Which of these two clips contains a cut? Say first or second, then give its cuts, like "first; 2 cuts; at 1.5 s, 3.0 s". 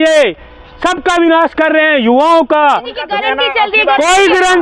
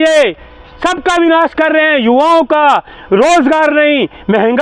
first; 1 cut; at 3.0 s